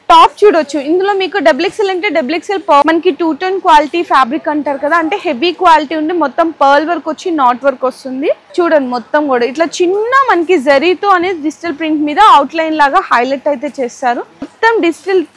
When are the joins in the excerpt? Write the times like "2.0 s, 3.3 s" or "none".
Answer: 2.8 s, 8.4 s, 14.5 s